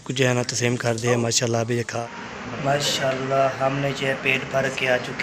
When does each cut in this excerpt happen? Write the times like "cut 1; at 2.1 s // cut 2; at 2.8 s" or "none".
cut 1; at 1.9 s